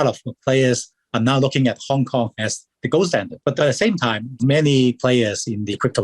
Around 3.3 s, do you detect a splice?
yes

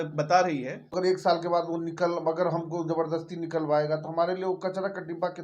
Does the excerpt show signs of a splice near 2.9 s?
no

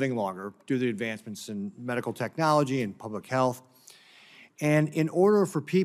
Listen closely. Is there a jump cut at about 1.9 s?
yes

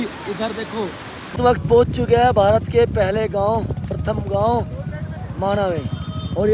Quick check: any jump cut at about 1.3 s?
yes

